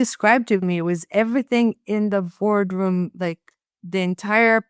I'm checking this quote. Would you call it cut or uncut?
uncut